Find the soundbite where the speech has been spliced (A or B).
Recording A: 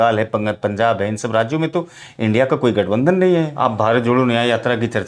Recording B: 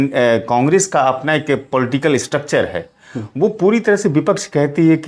A